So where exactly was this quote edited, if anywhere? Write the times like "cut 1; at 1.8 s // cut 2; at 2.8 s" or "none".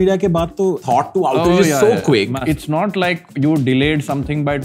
cut 1; at 0.8 s // cut 2; at 2.4 s